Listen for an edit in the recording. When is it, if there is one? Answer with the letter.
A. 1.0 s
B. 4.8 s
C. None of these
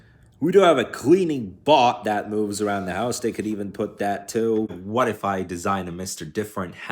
B